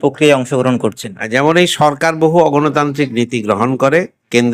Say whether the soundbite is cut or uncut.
uncut